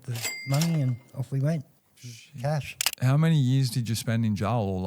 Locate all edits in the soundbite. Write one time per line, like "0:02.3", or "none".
0:02.9